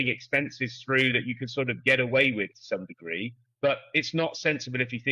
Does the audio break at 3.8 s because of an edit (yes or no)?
no